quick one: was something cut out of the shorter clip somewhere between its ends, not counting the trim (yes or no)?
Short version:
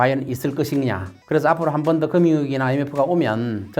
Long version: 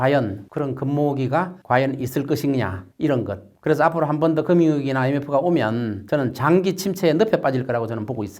yes